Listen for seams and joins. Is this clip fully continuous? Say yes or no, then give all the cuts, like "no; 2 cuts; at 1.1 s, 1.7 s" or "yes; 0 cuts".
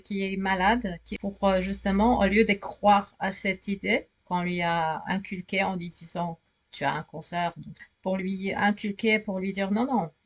no; 2 cuts; at 1.1 s, 7.7 s